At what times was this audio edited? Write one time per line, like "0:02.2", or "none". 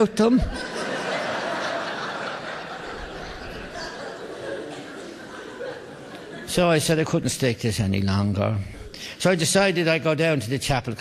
0:07.1